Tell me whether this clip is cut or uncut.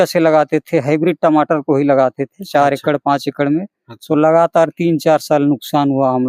uncut